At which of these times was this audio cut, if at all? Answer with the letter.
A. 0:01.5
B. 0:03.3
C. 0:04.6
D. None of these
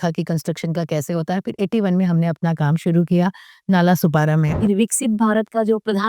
C